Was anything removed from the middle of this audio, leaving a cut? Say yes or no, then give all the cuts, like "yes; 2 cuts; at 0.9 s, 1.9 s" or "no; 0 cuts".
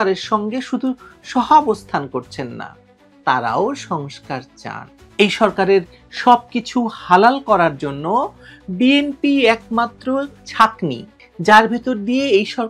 yes; 2 cuts; at 5.0 s, 11.1 s